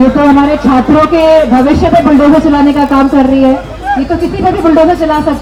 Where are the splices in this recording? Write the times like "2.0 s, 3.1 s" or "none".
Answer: none